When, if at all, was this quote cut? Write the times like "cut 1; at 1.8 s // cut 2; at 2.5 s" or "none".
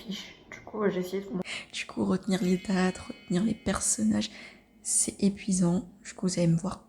cut 1; at 1.5 s